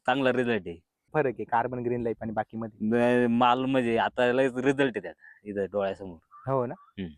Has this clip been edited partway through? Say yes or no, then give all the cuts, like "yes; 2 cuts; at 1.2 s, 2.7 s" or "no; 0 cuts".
yes; 1 cut; at 1.1 s